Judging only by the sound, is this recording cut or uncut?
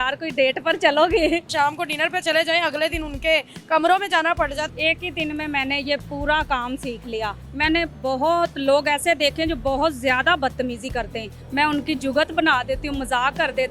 cut